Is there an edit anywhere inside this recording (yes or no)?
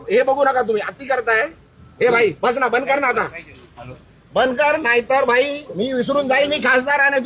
no